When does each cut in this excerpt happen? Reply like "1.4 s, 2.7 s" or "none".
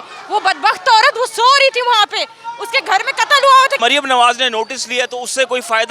3.8 s